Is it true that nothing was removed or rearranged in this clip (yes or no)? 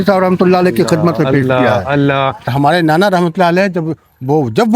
no